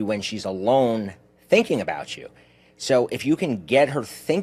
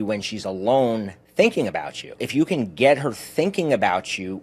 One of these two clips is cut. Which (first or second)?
second